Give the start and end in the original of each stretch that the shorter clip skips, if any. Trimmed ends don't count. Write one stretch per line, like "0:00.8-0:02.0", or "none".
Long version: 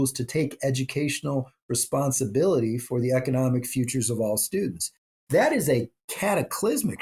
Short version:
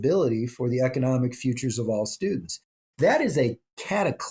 none